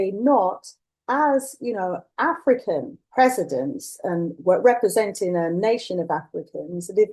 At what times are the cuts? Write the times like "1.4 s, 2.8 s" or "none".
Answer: 3.0 s

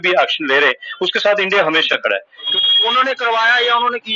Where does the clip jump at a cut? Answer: 2.5 s

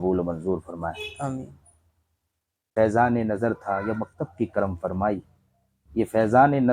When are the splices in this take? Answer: 2.7 s

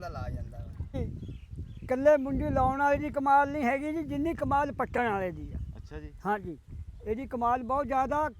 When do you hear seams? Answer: 1.0 s

